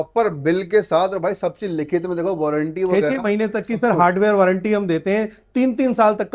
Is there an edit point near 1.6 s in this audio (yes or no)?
no